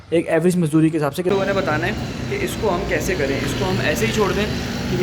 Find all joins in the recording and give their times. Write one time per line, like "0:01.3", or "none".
0:01.3